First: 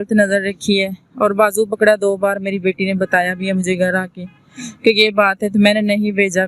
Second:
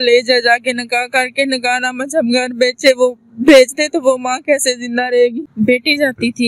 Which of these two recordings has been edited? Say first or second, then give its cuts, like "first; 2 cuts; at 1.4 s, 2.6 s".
second; 1 cut; at 5.4 s